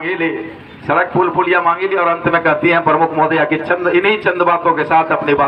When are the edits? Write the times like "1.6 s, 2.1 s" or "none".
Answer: none